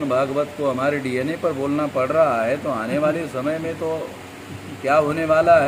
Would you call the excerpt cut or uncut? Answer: uncut